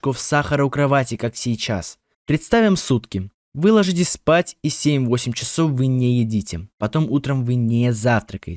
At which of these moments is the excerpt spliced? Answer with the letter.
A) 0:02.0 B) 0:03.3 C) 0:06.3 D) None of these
A